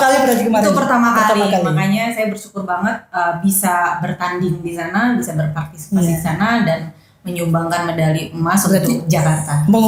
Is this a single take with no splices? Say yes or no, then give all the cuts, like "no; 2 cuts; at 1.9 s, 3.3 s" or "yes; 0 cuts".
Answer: yes; 0 cuts